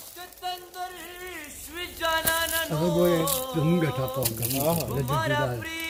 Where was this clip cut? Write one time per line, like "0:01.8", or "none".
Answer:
none